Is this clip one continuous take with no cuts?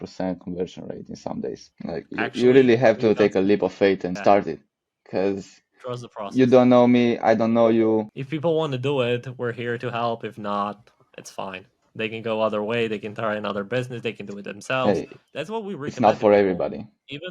no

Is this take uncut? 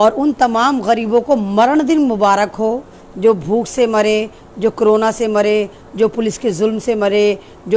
yes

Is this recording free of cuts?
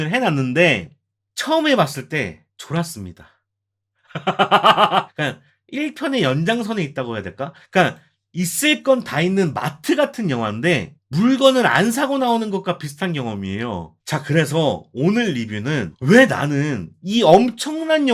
no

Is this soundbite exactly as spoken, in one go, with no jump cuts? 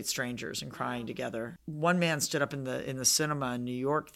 no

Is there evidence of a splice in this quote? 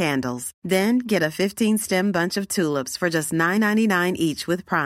no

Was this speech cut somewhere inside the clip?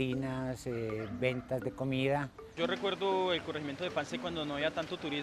yes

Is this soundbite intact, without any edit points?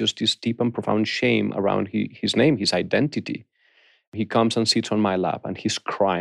no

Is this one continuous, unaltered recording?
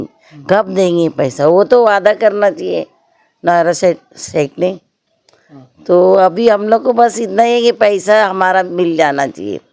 yes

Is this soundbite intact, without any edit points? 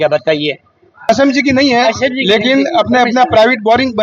no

